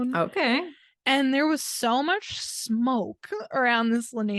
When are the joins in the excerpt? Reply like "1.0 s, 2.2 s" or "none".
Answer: 3.5 s